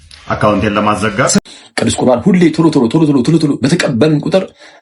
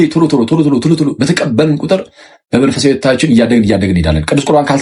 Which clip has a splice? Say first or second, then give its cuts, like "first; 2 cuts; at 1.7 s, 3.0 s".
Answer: first; 1 cut; at 1.4 s